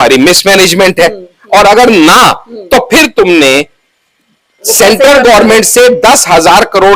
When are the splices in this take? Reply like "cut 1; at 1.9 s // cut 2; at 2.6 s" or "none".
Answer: none